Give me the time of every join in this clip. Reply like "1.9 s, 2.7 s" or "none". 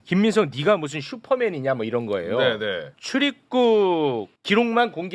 3.0 s